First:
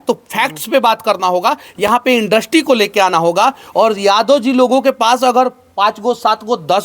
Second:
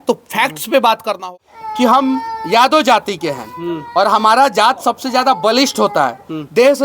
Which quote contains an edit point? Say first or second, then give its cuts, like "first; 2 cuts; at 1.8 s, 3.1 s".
second; 1 cut; at 1.3 s